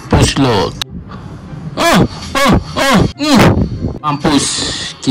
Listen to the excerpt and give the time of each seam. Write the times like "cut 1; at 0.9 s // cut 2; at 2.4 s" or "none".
cut 1; at 0.8 s // cut 2; at 3.2 s // cut 3; at 4.1 s